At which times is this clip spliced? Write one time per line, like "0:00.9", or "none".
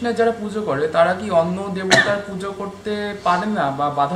none